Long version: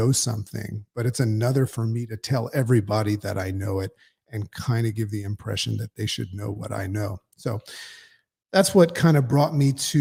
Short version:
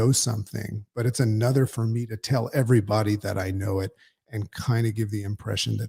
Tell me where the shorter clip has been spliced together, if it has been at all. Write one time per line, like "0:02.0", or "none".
none